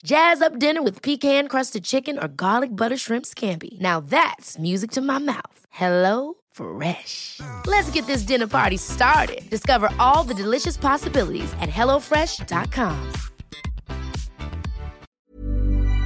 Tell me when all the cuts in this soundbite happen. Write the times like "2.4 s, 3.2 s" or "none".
15.1 s